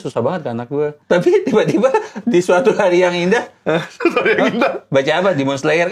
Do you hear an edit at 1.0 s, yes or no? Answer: yes